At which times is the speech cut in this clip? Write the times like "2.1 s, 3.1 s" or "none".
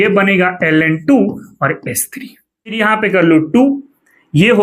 2.8 s